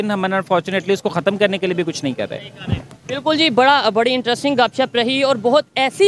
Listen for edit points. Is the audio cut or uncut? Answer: uncut